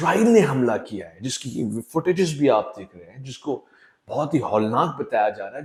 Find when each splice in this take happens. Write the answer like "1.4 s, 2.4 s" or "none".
none